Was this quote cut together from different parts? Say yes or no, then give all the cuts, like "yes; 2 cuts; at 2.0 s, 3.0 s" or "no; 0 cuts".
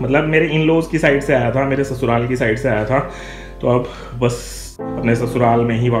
yes; 1 cut; at 4.8 s